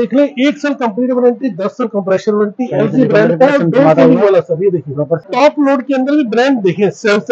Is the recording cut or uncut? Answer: cut